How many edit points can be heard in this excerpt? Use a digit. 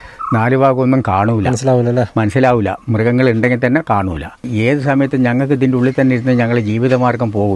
1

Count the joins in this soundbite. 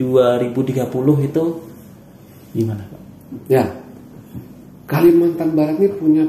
0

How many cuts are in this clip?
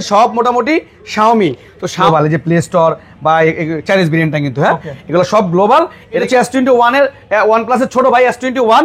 2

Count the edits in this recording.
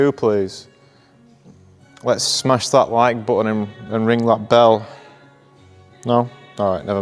0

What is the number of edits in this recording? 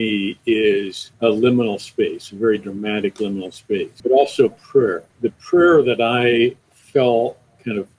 4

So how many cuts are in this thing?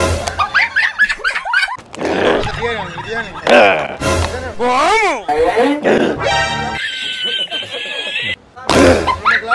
2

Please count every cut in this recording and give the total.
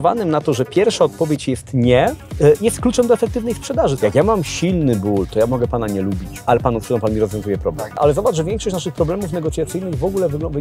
4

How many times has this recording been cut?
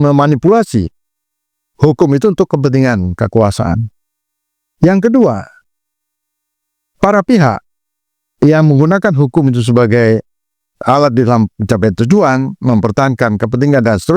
0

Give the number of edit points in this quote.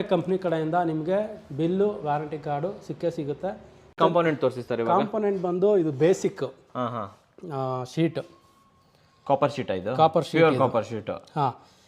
1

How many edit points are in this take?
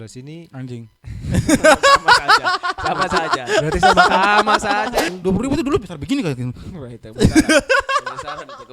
1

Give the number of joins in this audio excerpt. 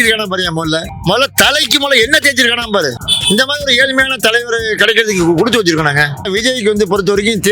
3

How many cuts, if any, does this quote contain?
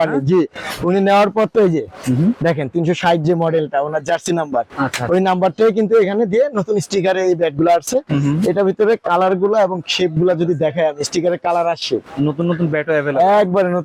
0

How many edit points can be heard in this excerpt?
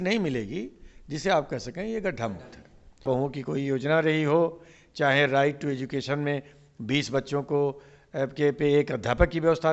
1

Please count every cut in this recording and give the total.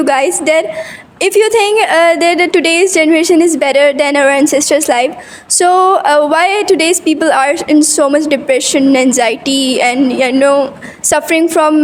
0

